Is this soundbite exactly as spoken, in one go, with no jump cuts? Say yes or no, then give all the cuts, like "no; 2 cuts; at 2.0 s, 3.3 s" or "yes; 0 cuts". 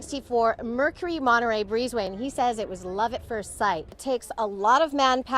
no; 1 cut; at 3.9 s